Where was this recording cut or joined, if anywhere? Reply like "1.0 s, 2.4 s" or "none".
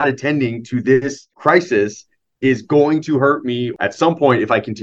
1.3 s, 3.7 s